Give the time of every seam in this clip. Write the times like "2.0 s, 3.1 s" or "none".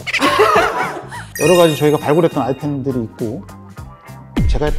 1.2 s